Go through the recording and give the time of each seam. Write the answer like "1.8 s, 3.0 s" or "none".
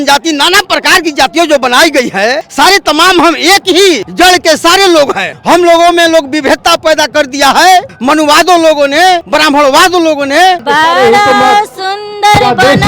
2.4 s, 4.1 s, 5.3 s, 7.9 s, 9.3 s, 10.6 s